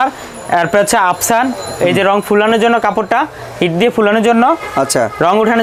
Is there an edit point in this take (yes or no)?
no